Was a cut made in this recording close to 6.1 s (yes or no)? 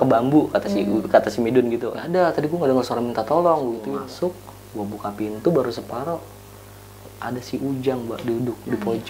no